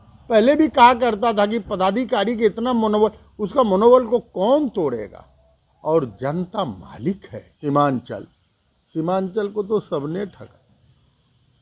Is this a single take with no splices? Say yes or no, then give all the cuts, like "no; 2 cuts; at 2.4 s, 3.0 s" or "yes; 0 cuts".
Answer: no; 1 cut; at 7.4 s